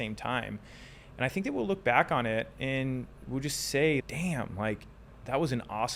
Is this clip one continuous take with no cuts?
yes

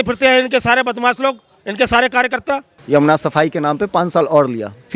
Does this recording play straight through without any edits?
no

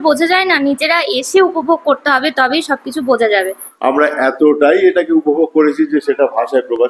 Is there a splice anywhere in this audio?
yes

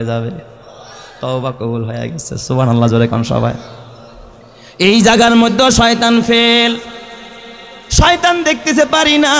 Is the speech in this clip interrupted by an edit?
no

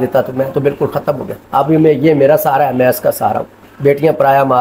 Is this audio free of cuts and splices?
yes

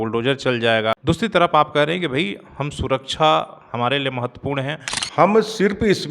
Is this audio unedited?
no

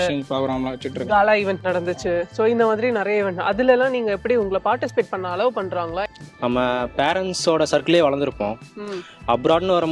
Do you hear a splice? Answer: yes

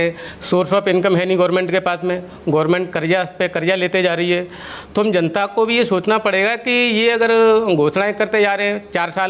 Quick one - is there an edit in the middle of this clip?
no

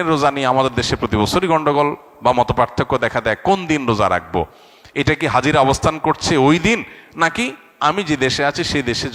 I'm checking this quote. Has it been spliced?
no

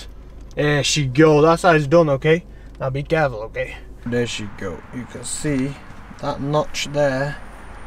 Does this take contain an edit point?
yes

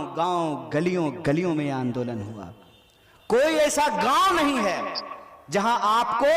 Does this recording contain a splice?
no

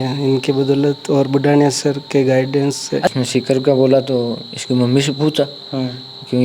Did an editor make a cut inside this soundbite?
yes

